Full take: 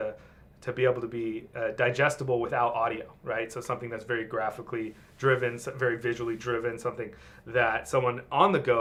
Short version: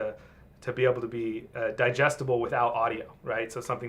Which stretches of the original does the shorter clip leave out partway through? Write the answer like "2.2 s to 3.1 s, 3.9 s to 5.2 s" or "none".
none